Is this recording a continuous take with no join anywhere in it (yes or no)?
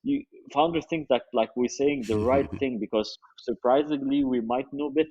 yes